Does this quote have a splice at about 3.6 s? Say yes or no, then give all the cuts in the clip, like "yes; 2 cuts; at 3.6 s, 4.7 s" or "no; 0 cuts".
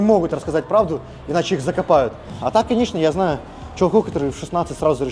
no; 1 cut; at 2.2 s